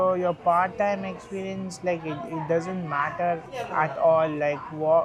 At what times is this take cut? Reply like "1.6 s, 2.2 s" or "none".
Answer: none